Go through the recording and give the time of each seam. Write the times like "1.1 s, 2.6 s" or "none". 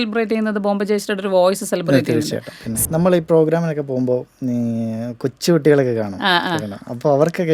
2.9 s